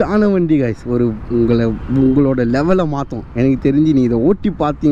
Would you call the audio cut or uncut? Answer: uncut